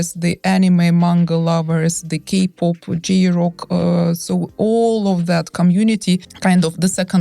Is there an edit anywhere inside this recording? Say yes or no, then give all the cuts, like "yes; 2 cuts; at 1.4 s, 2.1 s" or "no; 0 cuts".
no; 0 cuts